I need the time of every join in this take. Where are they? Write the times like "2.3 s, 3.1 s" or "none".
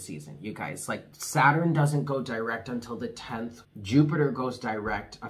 1.2 s, 3.6 s